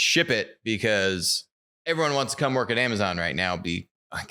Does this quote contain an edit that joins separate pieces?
no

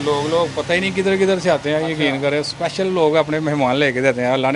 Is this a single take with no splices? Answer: yes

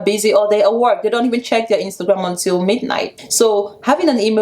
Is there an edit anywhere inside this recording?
yes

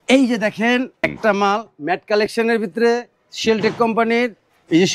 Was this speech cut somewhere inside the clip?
yes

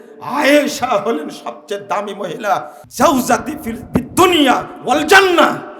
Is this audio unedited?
no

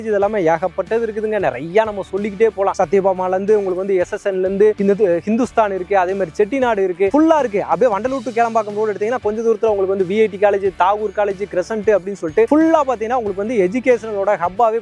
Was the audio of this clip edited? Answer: no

